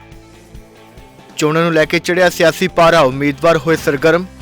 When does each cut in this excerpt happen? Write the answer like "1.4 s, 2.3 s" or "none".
0.9 s